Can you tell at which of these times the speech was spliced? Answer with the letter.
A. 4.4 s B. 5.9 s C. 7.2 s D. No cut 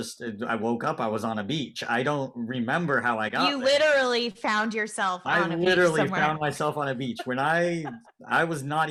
D